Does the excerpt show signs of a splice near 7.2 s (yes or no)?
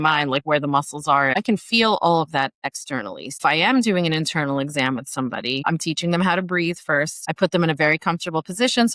yes